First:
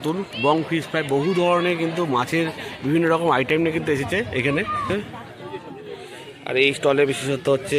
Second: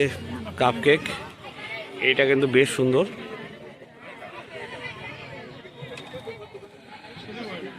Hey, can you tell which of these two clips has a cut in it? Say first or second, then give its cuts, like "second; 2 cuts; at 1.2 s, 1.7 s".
first; 1 cut; at 4.9 s